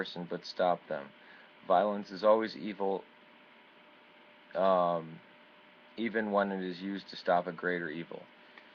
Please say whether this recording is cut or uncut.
cut